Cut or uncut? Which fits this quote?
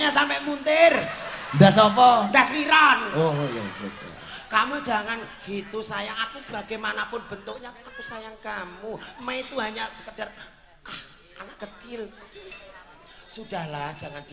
uncut